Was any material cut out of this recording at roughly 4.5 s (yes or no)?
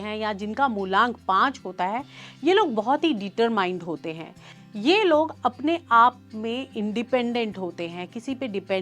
no